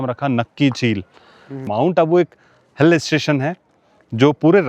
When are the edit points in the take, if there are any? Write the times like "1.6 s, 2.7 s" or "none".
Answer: 1.7 s